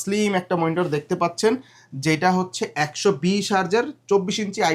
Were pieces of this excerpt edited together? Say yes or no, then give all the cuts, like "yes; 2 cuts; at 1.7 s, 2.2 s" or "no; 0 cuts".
no; 0 cuts